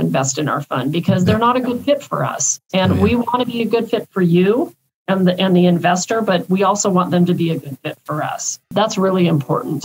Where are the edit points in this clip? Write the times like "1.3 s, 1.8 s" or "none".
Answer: 8.7 s